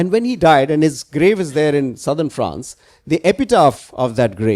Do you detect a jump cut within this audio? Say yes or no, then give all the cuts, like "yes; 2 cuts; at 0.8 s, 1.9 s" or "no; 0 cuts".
no; 0 cuts